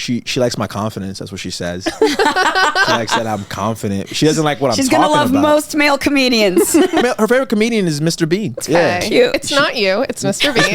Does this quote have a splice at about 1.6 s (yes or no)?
no